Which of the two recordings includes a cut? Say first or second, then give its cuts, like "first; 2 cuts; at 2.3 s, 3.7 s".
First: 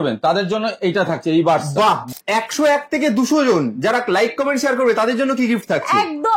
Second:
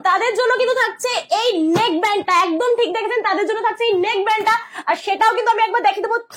first; 1 cut; at 2.1 s